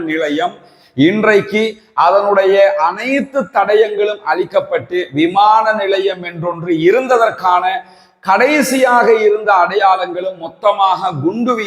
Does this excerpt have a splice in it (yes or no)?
no